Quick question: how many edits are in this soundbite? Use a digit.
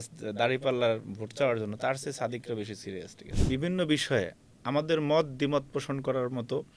1